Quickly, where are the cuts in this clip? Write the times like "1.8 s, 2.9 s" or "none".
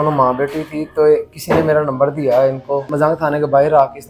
2.9 s